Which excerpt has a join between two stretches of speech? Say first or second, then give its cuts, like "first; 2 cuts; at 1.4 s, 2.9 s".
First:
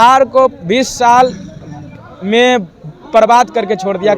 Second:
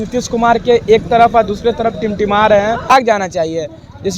second; 1 cut; at 2.9 s